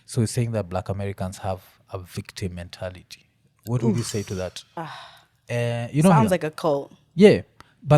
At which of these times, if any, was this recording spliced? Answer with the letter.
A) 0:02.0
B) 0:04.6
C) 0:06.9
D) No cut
B